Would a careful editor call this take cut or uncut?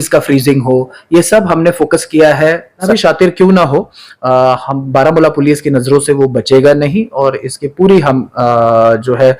cut